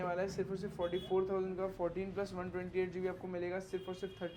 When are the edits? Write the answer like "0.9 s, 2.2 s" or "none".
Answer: none